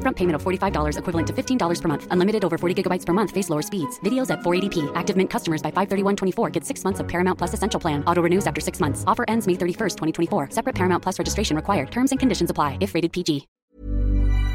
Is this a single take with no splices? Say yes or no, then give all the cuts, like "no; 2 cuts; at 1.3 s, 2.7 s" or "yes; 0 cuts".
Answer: no; 1 cut; at 13.5 s